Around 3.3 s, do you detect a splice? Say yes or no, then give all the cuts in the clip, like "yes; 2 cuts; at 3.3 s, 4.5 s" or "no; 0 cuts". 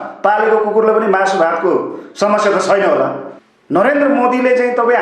yes; 1 cut; at 3.3 s